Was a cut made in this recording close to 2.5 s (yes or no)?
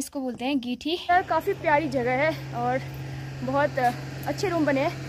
no